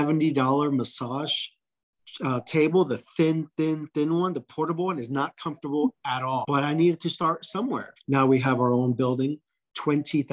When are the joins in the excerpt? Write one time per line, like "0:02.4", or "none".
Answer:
0:06.4
0:07.9